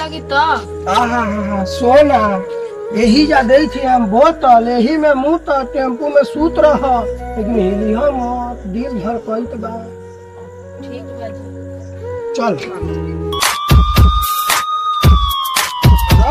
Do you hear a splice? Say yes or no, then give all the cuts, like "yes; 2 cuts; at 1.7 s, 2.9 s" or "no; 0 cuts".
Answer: no; 0 cuts